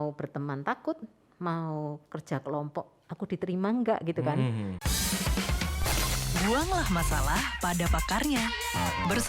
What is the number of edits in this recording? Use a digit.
1